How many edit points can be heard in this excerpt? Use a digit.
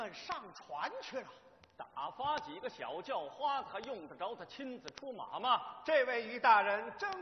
1